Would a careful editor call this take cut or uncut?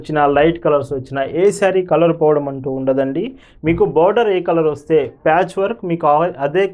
uncut